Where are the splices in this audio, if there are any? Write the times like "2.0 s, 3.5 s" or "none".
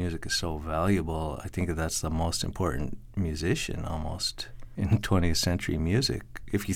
4.2 s